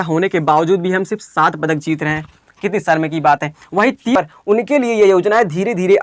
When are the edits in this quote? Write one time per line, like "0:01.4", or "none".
0:04.1